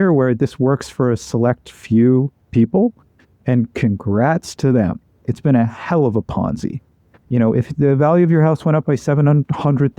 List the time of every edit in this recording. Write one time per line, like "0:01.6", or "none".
0:05.2